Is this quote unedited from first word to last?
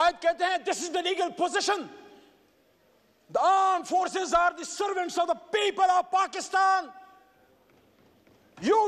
yes; 0 cuts

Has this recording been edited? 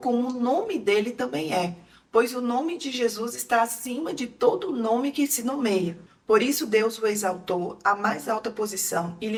no; 0 cuts

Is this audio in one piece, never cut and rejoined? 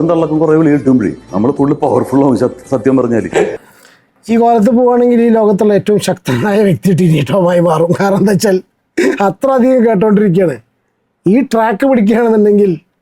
no; 1 cut; at 3.6 s

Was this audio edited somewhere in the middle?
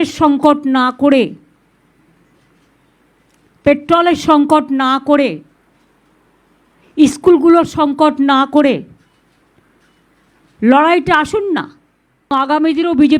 yes; 1 cut; at 12.3 s

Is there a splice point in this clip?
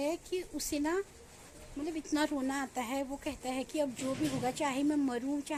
no; 0 cuts

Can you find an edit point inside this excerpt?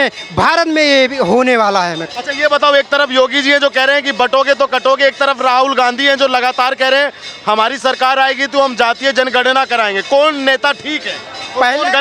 no; 0 cuts

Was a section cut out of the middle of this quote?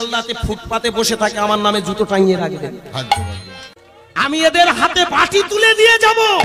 yes; 1 cut; at 4.3 s

